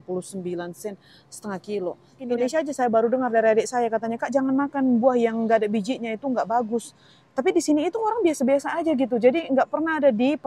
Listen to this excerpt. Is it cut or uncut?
cut